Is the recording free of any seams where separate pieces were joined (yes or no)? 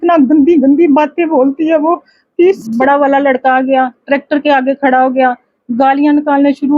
no